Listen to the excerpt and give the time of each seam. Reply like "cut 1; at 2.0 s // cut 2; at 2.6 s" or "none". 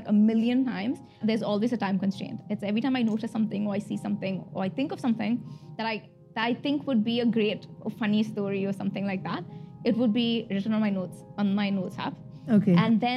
cut 1; at 1.2 s